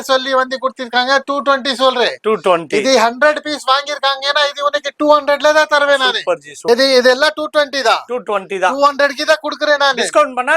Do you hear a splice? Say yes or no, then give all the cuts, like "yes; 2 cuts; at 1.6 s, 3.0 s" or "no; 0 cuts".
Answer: yes; 1 cut; at 6.5 s